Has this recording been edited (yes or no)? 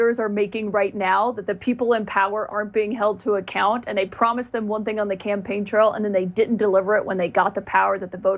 no